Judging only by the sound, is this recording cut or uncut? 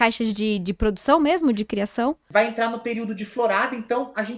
cut